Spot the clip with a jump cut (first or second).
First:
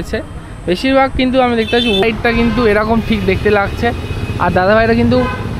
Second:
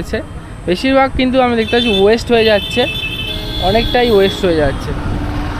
first